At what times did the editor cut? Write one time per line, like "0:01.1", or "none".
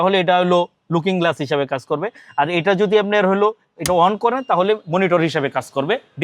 none